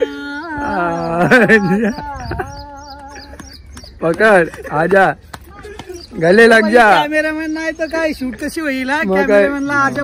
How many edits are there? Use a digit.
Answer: 0